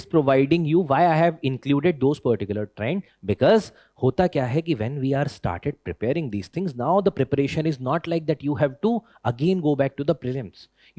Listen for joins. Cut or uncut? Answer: uncut